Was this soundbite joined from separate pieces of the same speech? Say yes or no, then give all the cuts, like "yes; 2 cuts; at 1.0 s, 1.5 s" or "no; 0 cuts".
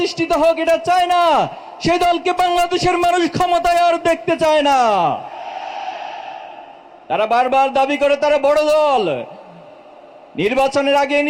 no; 0 cuts